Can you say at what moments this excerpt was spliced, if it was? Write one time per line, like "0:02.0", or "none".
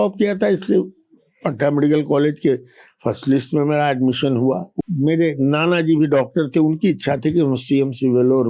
0:04.7